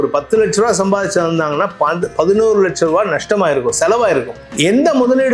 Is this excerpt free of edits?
no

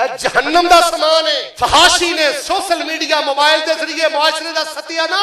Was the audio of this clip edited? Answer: yes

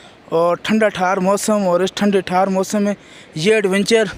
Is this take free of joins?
yes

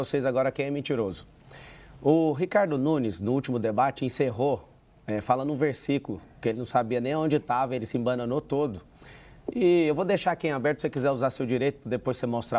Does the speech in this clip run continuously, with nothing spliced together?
yes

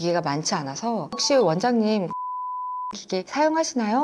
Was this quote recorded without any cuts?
yes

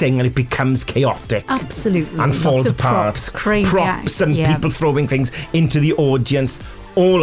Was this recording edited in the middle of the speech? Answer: no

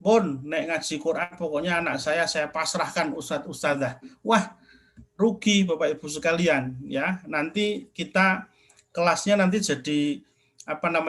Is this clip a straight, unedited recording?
yes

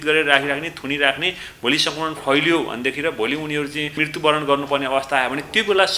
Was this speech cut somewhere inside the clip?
yes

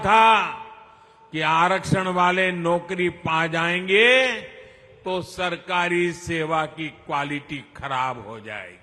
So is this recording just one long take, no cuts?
yes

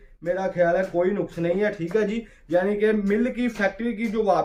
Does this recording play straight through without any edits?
yes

